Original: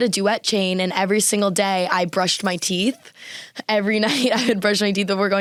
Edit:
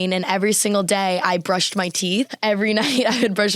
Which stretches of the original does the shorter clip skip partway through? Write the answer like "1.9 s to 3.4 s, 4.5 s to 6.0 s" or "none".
3.0 s to 3.6 s